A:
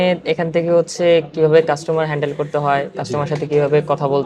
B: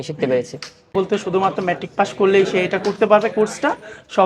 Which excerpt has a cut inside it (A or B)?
B